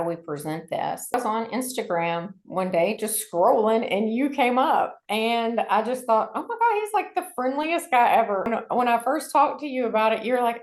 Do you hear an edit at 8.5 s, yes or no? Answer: yes